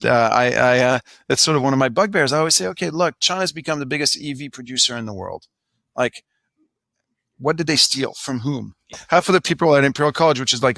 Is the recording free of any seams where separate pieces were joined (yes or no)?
no